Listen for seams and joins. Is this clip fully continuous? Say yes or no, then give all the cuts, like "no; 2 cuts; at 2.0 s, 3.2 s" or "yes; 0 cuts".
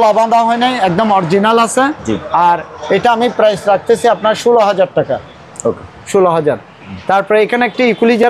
yes; 0 cuts